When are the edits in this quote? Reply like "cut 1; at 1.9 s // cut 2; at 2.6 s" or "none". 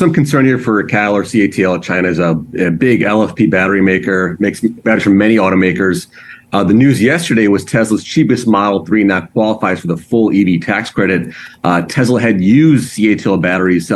none